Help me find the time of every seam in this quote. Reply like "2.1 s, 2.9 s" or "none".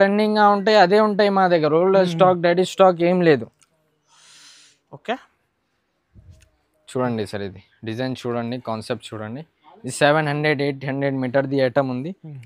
none